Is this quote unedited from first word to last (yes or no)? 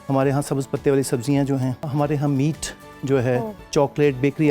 no